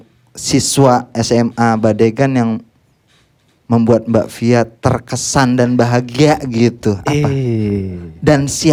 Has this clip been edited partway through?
no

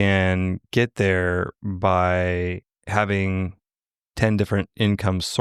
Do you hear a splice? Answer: no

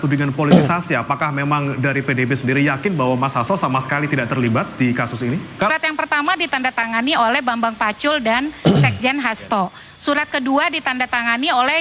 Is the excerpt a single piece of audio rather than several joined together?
no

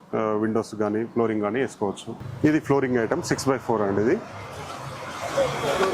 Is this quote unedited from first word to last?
no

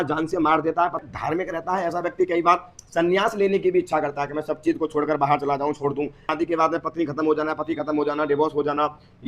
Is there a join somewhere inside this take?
yes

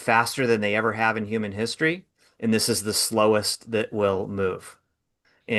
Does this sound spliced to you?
no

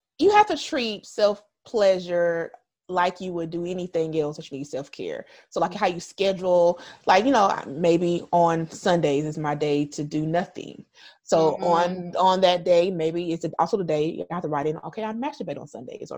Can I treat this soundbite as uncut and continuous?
no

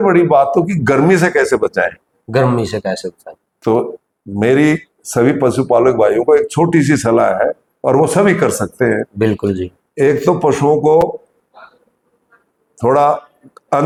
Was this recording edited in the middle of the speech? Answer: no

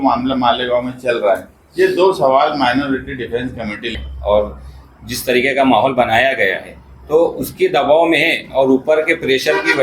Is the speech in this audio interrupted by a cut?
yes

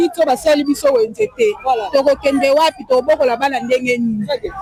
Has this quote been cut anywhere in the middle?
no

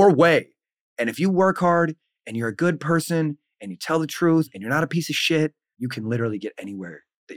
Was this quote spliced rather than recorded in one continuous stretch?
yes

